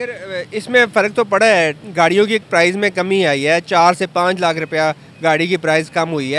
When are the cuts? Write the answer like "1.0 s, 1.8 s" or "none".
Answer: none